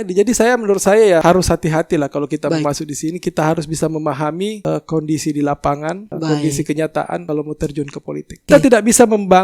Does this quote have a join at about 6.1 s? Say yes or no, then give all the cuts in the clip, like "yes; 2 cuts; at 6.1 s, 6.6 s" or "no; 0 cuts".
yes; 5 cuts; at 1.2 s, 4.6 s, 6.1 s, 7.2 s, 8.5 s